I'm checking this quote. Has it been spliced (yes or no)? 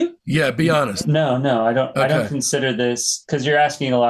no